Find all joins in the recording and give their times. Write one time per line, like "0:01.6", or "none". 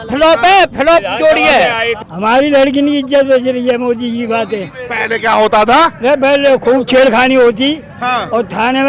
0:01.9

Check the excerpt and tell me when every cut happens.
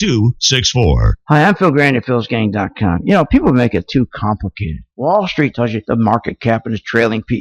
0:01.1

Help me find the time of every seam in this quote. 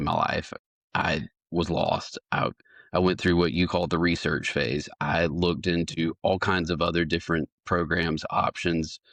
none

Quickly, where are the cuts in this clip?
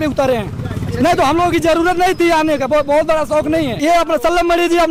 0:03.8

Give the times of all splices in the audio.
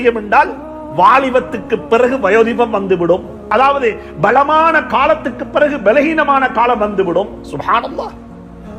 0:03.4

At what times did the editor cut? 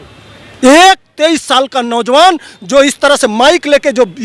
none

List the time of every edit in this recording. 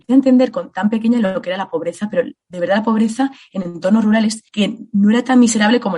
0:04.4

